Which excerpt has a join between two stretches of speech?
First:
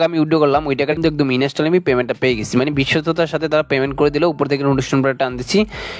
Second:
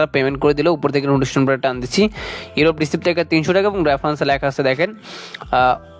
first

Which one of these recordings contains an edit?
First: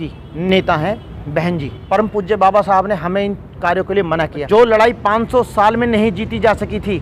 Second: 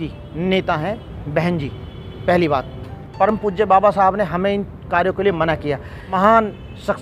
first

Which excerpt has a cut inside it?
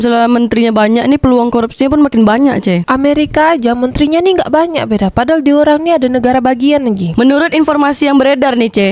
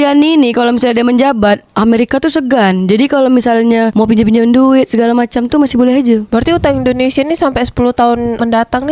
first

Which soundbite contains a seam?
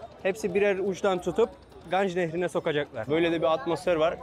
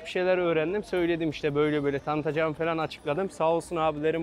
first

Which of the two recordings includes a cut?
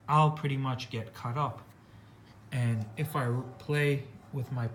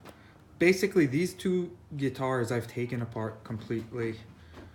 first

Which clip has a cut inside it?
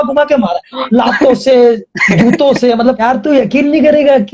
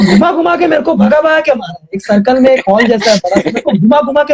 first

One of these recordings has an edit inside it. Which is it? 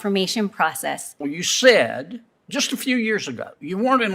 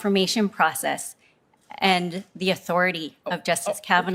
first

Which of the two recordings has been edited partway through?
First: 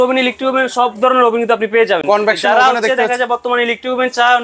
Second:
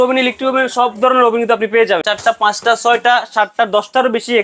second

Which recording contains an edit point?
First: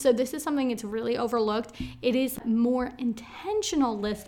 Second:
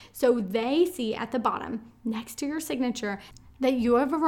first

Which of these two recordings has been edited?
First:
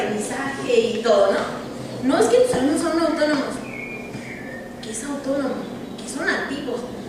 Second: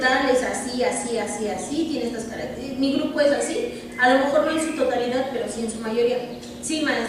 first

